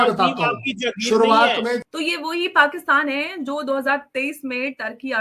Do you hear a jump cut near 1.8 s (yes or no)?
yes